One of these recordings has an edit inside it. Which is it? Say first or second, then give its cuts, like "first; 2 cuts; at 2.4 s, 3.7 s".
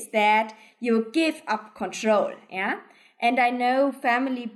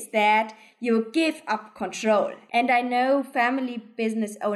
second; 1 cut; at 2.4 s